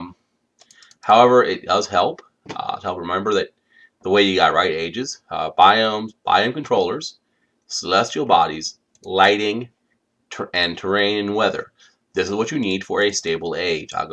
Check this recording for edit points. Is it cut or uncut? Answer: cut